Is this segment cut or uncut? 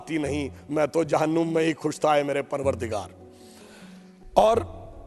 uncut